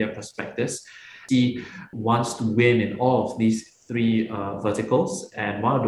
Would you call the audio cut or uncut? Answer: cut